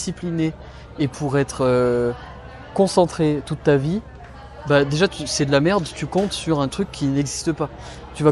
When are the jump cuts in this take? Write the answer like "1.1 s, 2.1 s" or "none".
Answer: none